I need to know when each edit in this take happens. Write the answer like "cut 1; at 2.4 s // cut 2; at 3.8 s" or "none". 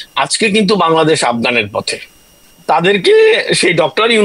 cut 1; at 2.5 s